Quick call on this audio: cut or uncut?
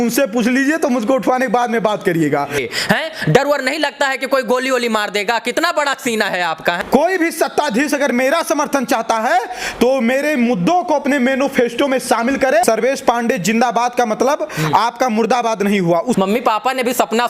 cut